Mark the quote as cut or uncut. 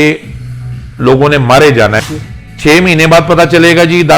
cut